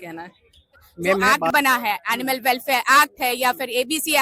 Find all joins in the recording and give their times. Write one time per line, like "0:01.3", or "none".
0:01.4